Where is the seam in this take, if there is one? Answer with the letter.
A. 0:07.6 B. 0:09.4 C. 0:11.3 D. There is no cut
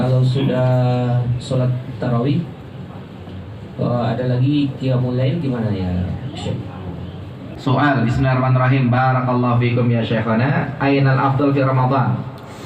A